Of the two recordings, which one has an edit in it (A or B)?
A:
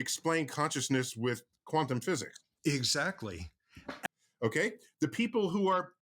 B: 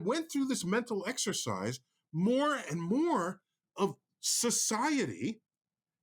A